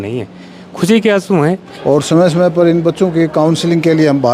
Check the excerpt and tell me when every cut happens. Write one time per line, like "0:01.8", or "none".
0:01.7